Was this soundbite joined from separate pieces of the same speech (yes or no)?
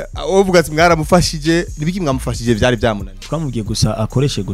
yes